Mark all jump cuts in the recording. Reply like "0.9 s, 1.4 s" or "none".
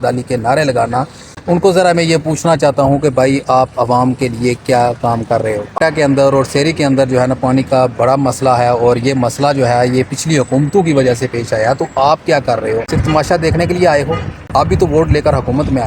5.8 s, 12.9 s